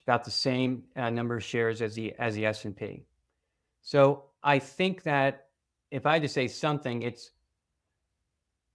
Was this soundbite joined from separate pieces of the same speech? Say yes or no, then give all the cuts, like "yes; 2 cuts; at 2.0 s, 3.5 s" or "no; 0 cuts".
no; 0 cuts